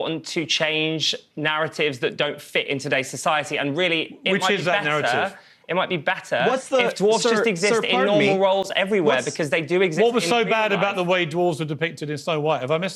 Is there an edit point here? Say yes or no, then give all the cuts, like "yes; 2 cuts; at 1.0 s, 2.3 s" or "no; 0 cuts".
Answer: yes; 1 cut; at 9.9 s